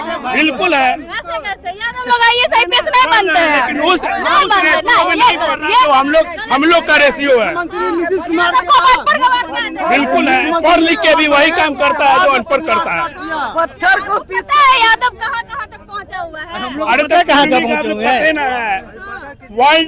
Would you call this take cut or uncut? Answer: uncut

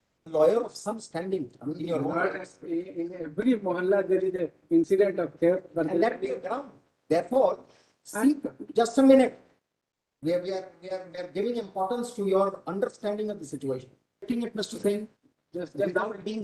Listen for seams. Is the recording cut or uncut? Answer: cut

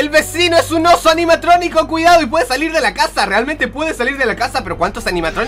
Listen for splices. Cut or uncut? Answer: uncut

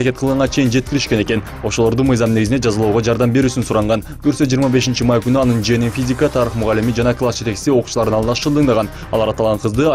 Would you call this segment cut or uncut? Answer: uncut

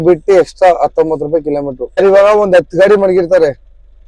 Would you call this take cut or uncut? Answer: cut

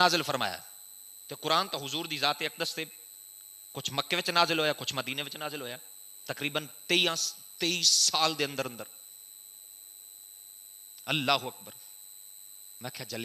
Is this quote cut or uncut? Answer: uncut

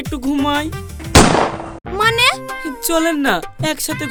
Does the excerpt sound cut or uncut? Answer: uncut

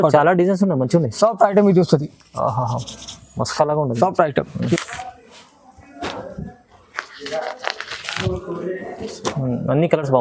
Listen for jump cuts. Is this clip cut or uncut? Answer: cut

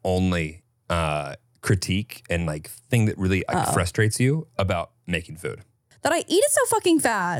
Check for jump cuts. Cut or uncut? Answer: cut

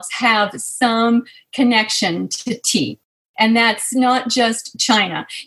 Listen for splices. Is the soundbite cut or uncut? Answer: uncut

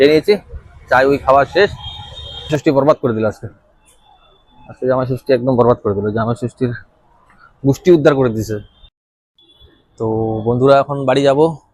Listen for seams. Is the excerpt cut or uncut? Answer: cut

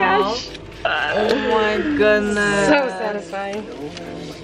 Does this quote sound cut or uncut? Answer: uncut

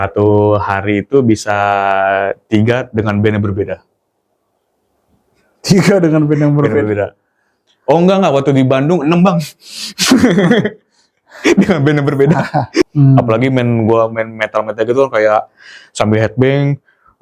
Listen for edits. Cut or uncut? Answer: cut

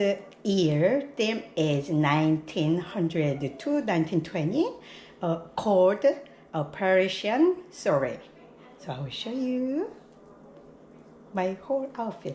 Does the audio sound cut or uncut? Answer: uncut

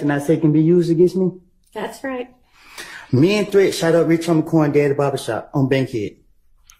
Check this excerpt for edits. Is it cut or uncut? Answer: uncut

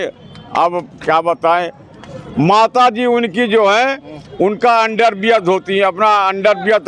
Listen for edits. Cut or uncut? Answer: uncut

